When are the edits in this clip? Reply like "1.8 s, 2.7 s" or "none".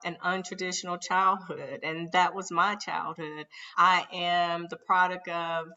none